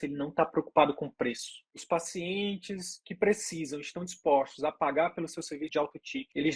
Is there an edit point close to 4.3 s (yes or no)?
no